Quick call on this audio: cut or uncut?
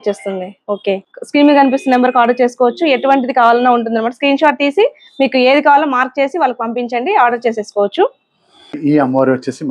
cut